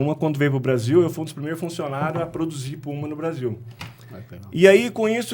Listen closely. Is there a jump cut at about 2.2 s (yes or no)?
no